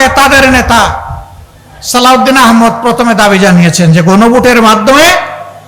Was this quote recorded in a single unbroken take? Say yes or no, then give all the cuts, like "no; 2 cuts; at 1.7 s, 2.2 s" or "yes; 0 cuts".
yes; 0 cuts